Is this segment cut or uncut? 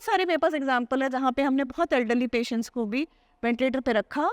uncut